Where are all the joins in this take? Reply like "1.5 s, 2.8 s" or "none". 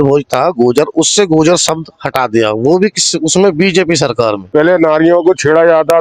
4.4 s